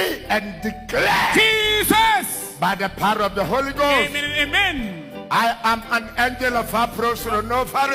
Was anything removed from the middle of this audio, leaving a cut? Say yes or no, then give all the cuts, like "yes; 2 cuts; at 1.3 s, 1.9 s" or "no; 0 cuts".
no; 0 cuts